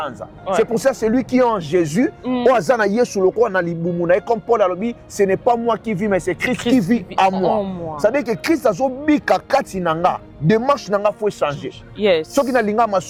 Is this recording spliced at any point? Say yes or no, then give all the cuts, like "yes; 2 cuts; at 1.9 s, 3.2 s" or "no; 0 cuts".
no; 0 cuts